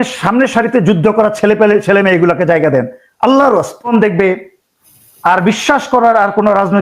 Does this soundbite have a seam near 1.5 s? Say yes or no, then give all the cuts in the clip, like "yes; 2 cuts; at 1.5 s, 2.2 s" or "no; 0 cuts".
no; 1 cut; at 3.9 s